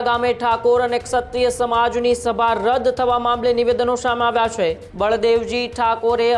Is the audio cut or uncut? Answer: cut